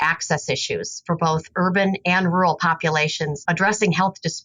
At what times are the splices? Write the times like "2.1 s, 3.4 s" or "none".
0.9 s, 3.4 s